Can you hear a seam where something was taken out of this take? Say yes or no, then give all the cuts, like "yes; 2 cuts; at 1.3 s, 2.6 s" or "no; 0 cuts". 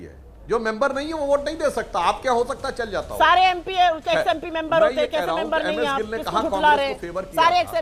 no; 0 cuts